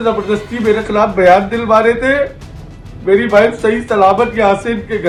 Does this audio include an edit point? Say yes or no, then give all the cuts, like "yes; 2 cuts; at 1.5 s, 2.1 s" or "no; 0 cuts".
no; 0 cuts